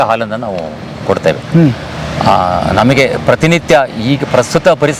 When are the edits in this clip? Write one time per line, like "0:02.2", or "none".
none